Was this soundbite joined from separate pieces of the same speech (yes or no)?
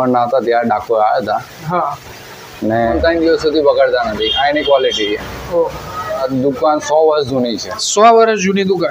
yes